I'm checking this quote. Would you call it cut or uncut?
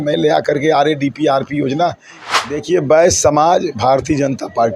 cut